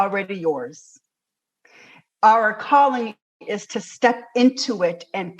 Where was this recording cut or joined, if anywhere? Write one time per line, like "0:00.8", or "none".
0:02.0